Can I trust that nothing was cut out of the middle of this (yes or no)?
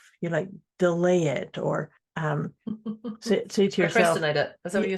no